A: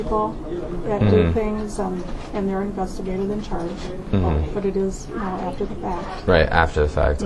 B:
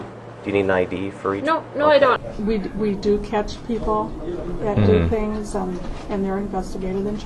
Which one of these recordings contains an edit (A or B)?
B